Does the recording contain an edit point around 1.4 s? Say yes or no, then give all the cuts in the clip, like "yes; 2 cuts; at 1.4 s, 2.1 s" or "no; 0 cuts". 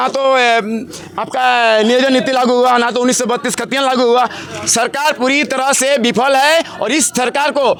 no; 0 cuts